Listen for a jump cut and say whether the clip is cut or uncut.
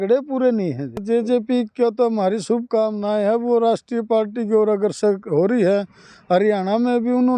cut